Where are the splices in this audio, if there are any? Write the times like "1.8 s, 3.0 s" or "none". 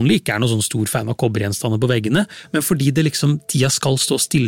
none